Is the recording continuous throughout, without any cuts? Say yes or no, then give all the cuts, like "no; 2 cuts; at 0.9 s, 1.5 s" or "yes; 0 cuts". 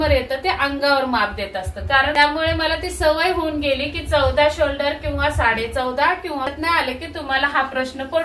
no; 2 cuts; at 2.1 s, 6.5 s